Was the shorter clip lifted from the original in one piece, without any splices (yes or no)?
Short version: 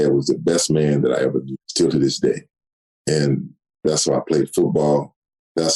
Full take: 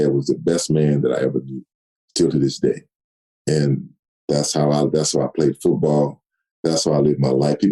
no